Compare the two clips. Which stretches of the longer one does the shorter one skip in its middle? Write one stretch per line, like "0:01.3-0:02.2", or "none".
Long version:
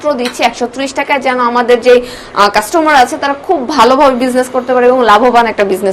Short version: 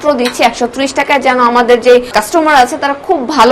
0:02.1-0:02.5